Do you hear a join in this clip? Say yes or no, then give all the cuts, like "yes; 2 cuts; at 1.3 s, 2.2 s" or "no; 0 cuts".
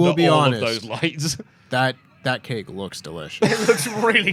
no; 0 cuts